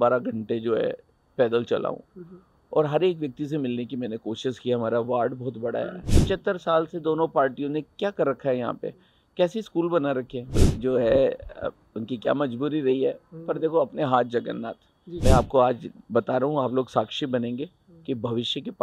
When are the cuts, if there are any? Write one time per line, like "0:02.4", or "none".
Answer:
0:06.0
0:10.6
0:15.0

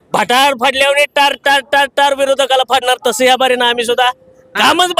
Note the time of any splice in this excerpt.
none

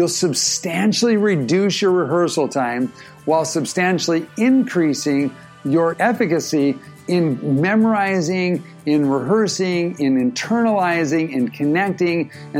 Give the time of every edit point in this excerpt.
0:05.9

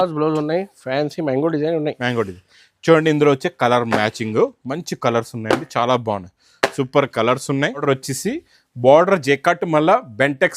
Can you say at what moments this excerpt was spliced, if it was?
0:07.8

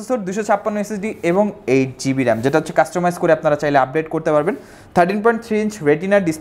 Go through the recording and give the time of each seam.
none

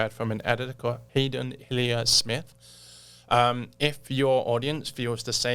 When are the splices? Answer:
0:01.0

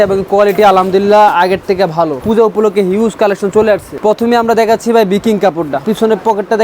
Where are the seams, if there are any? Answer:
0:02.2
0:03.9
0:05.8

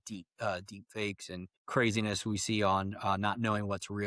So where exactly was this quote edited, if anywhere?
0:01.5

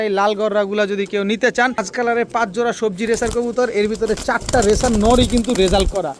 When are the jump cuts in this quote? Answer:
0:01.8

